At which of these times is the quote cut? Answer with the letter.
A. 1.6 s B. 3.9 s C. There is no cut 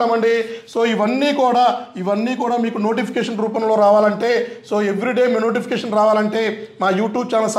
C